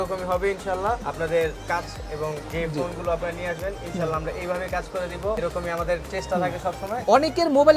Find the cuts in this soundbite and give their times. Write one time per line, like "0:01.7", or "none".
0:01.1
0:02.4
0:05.4
0:07.0